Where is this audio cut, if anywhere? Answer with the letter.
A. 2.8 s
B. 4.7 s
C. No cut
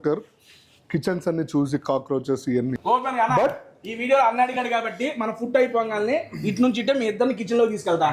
A